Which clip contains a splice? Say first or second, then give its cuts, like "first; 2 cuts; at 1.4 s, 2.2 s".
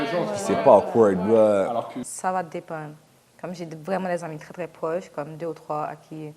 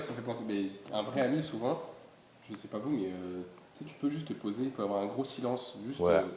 first; 1 cut; at 2.0 s